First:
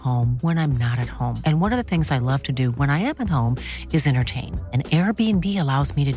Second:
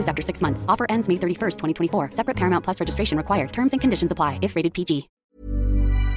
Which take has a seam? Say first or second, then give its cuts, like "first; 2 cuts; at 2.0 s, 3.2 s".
second; 1 cut; at 5.2 s